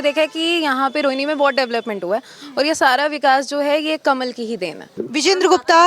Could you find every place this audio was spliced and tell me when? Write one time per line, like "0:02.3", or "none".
0:05.0